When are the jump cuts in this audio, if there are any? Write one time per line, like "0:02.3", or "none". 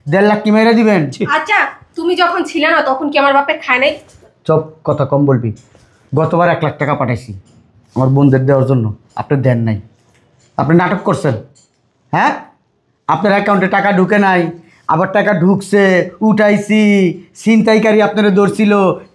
none